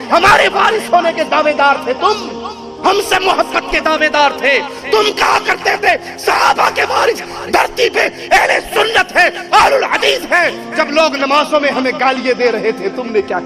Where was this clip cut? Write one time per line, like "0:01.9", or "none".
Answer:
none